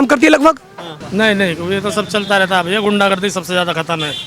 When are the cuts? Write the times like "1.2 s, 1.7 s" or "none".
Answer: 1.0 s